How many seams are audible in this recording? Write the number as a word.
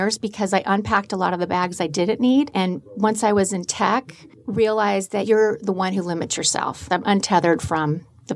three